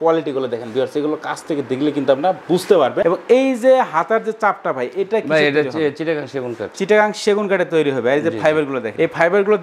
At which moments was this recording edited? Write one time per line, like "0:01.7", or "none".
none